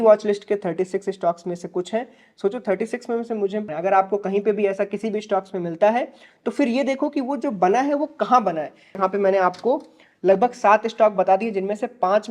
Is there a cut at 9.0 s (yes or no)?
yes